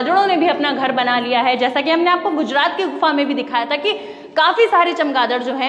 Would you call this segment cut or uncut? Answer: uncut